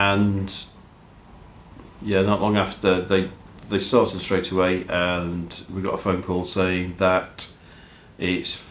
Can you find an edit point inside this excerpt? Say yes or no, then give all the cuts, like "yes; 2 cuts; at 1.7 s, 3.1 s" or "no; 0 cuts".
no; 0 cuts